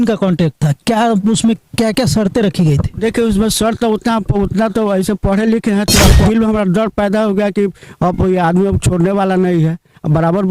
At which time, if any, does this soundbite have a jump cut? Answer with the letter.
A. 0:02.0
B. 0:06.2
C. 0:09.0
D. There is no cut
B